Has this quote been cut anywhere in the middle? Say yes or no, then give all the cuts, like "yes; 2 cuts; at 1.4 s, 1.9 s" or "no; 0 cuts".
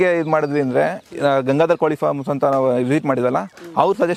no; 0 cuts